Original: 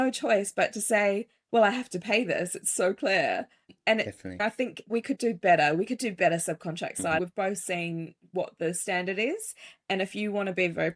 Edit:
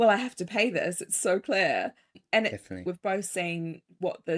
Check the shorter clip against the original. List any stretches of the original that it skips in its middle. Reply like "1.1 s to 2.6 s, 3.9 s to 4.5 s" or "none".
4.4 s to 7.2 s